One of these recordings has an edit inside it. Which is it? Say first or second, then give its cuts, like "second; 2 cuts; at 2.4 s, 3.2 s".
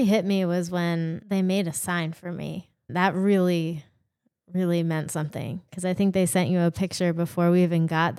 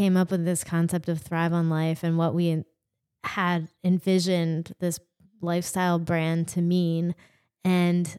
first; 3 cuts; at 1.2 s, 2.9 s, 5.6 s